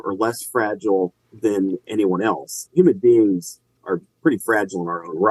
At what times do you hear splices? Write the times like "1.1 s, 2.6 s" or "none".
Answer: 2.7 s, 3.8 s